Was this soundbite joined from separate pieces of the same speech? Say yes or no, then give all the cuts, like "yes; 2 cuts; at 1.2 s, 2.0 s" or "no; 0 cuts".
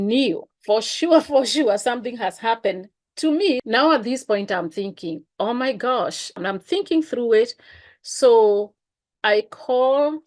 yes; 2 cuts; at 3.6 s, 6.4 s